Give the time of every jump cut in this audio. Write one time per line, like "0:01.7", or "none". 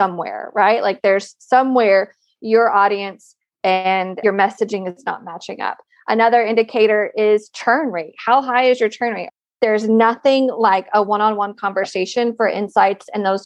0:04.2
0:09.4

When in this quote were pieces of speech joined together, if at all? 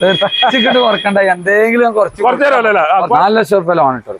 0:03.2

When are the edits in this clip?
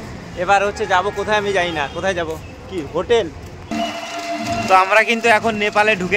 0:03.7

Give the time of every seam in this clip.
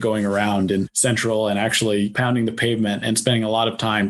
0:00.9
0:02.1

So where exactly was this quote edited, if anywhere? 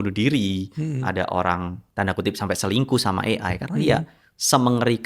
0:01.8

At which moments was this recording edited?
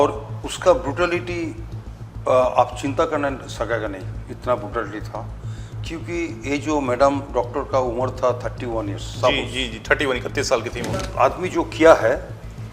0:11.1

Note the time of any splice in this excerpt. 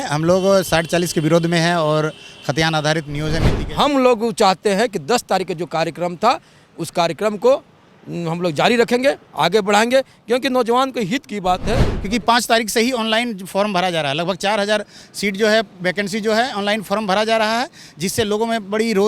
0:03.6
0:11.9

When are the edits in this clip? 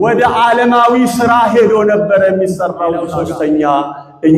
0:03.2

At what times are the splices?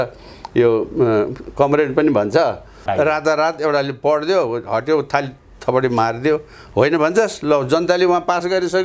0:02.8

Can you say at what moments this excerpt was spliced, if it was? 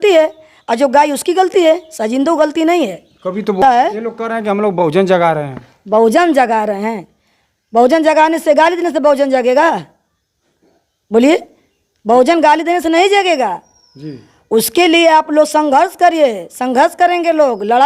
0:03.6

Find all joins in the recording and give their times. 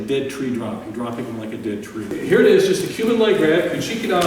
0:02.1

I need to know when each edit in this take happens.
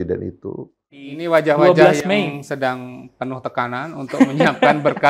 0:01.1

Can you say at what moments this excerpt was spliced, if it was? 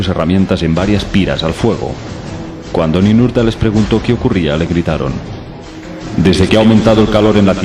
0:03.7

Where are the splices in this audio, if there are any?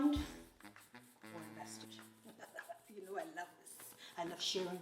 0:02.0

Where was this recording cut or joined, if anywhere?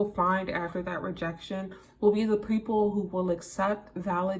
none

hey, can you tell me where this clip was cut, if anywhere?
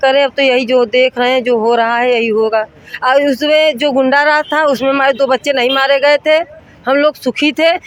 none

